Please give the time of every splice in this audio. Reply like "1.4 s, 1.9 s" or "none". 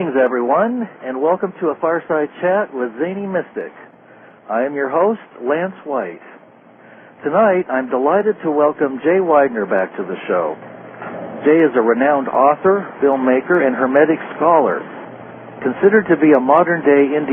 4.4 s

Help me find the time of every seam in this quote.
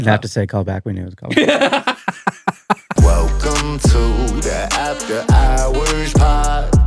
2.9 s

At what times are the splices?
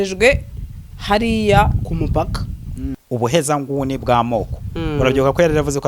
2.9 s

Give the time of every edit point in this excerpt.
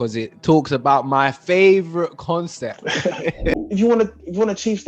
3.5 s

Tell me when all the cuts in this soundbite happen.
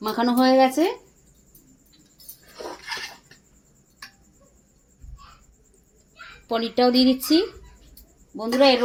none

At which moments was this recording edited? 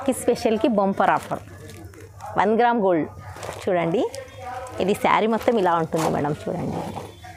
none

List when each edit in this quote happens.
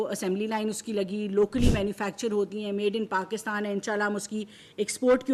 none

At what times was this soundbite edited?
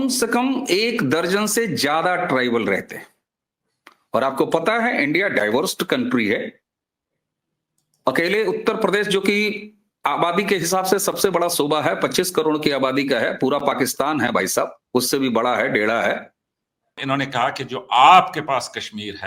17.0 s

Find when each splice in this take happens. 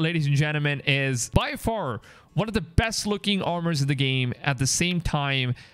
1.2 s

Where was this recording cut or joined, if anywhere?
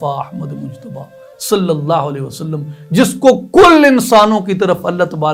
none

